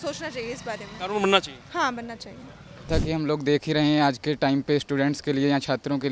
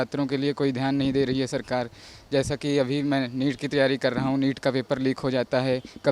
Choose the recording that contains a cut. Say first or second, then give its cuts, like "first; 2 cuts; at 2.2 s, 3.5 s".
first; 1 cut; at 2.9 s